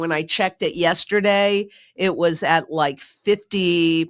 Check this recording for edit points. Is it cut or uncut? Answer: uncut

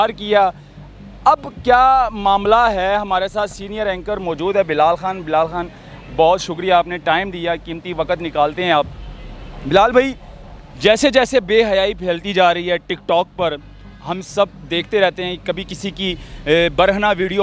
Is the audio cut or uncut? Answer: uncut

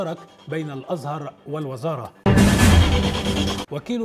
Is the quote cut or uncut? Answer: uncut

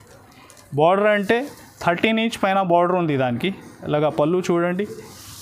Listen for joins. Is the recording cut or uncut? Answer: uncut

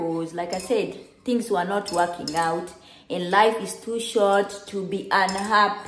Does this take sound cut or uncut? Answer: uncut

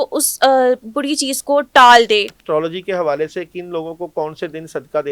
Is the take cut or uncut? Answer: cut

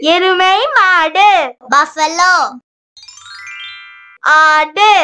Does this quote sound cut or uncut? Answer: uncut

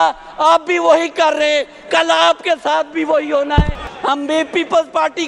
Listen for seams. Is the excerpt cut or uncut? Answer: cut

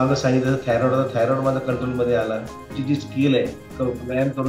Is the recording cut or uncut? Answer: cut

